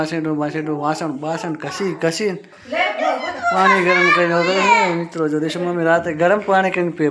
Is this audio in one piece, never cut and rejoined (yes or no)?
yes